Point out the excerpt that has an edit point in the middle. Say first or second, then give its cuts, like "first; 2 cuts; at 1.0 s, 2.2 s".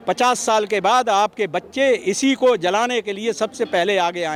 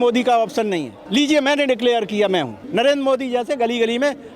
second; 2 cuts; at 0.9 s, 2.6 s